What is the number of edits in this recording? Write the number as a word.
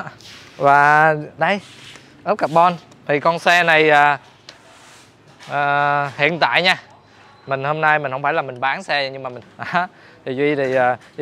one